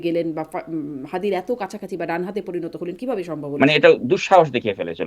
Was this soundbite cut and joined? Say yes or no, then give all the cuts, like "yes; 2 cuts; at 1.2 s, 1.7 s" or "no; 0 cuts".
yes; 1 cut; at 3.4 s